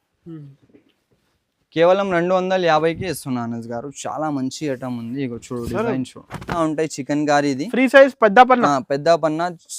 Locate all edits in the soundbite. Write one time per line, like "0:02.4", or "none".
0:06.5